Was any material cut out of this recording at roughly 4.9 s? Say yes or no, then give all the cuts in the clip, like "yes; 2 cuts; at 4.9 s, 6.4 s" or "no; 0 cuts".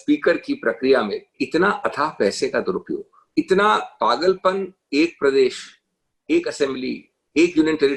no; 2 cuts; at 1.4 s, 3.1 s